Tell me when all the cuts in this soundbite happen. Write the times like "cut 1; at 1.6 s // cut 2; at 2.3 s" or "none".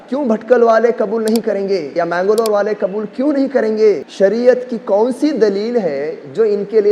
cut 1; at 1.9 s // cut 2; at 4.1 s